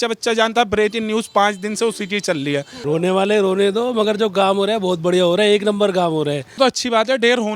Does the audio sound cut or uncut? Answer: cut